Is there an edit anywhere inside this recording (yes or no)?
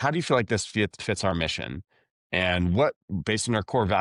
no